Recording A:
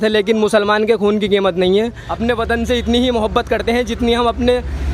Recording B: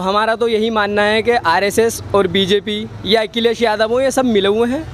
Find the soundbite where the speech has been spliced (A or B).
A